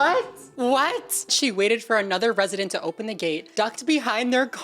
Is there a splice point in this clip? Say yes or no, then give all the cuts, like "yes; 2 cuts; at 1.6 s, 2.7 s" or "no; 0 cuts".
yes; 1 cut; at 1.3 s